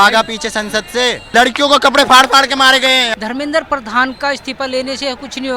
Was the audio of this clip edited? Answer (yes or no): yes